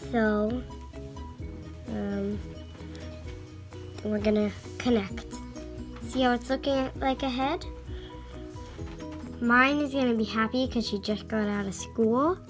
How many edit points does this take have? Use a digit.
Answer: 2